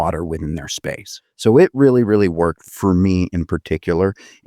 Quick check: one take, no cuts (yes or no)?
no